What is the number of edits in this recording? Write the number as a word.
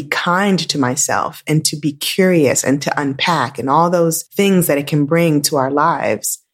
one